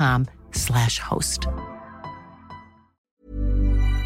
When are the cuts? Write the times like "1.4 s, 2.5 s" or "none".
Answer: 3.1 s